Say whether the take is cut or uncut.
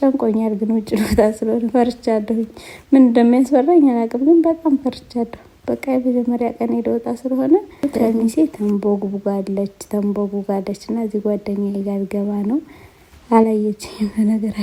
uncut